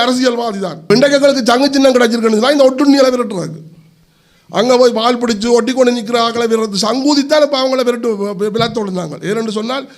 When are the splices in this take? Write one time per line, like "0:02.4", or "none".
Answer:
0:00.9